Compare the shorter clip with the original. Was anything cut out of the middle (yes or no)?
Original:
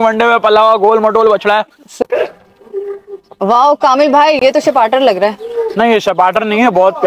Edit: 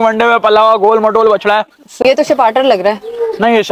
yes